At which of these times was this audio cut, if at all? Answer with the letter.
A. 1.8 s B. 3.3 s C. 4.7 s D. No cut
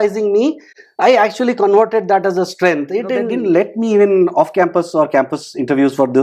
B